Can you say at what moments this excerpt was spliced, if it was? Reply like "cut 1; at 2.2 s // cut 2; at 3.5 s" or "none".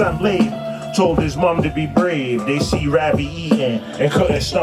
none